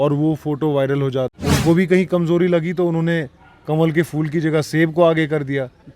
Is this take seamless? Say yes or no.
no